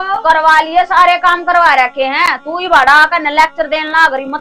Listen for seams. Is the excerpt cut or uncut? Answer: uncut